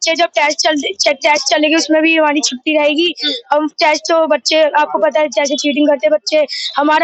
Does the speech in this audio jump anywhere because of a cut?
no; 0 cuts

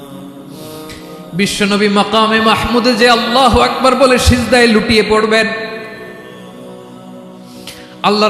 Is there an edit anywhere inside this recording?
no; 0 cuts

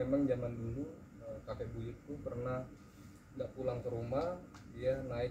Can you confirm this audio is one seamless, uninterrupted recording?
yes; 0 cuts

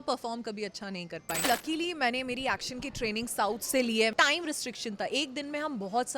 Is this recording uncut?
no; 2 cuts; at 1.4 s, 4.1 s

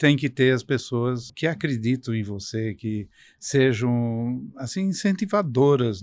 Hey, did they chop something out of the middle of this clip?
yes; 1 cut; at 1.3 s

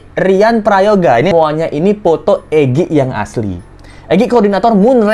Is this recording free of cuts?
no; 1 cut; at 1.3 s

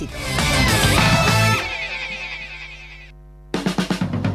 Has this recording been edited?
yes; 1 cut; at 3.1 s

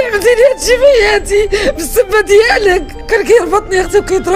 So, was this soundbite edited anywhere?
yes; 1 cut; at 2.9 s

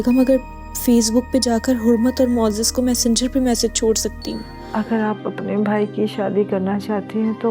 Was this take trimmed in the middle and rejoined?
yes; 1 cut; at 4.5 s

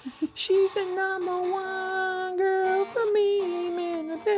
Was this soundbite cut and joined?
no; 0 cuts

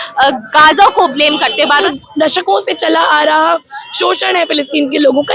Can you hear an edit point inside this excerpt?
yes; 1 cut; at 1.7 s

